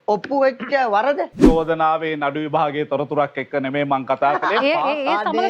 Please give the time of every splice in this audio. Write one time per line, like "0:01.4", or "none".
0:01.4